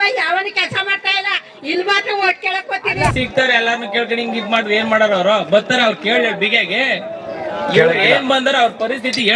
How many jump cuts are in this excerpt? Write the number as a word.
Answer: one